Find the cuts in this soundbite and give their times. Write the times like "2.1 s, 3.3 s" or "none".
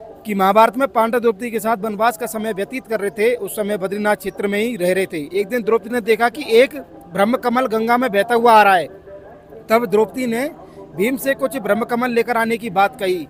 none